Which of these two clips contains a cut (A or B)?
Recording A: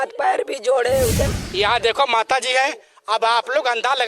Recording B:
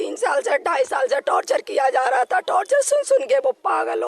A